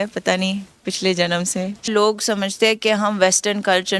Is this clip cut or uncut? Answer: cut